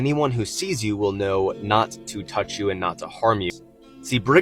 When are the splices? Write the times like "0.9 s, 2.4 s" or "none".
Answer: 3.5 s